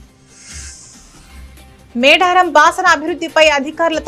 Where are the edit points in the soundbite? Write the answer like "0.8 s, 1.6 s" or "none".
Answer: 1.5 s